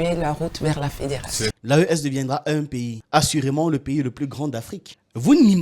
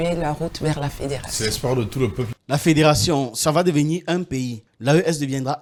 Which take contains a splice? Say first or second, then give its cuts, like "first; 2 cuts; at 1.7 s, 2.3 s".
first; 1 cut; at 1.5 s